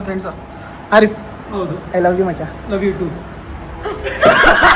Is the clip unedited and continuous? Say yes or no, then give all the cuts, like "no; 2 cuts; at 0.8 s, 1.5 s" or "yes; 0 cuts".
yes; 0 cuts